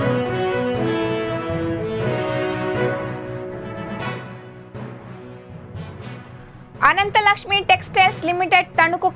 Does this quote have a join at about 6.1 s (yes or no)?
yes